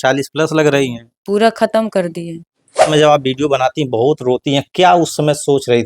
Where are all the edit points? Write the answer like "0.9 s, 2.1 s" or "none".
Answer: 2.9 s